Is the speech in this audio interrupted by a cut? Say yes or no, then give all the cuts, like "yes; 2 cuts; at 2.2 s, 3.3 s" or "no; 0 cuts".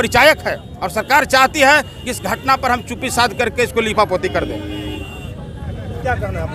no; 0 cuts